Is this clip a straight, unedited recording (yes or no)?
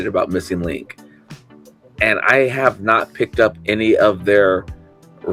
yes